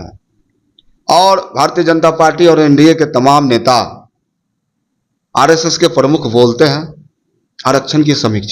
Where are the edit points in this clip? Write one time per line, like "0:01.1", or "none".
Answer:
none